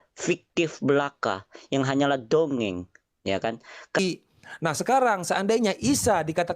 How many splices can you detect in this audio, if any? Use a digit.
1